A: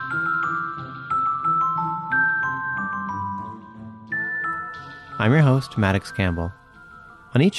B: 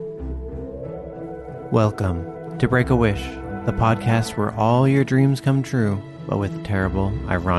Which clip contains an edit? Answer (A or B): A